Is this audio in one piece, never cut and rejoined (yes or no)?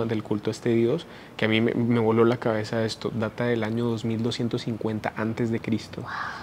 yes